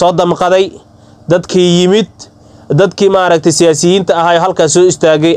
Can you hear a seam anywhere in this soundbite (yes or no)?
no